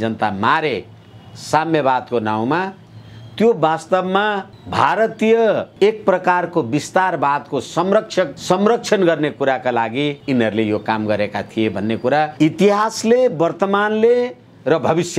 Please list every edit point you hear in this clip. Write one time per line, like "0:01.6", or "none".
0:04.5
0:05.7
0:08.4
0:10.2
0:12.3